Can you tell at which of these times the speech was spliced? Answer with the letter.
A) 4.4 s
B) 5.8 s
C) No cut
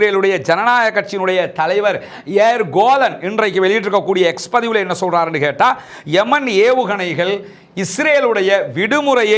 C